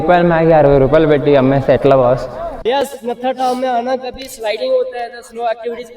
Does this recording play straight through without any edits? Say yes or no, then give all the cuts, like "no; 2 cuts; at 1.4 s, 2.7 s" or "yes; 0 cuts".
no; 1 cut; at 2.6 s